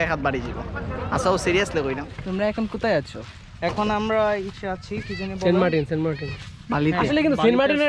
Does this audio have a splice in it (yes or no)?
yes